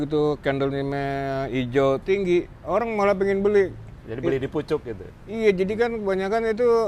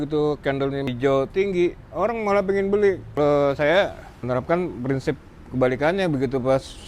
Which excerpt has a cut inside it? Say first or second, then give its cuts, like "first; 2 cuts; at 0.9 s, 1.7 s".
second; 3 cuts; at 0.9 s, 3.2 s, 4.1 s